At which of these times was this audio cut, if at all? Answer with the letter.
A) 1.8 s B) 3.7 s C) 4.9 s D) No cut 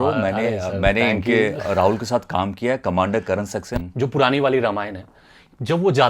B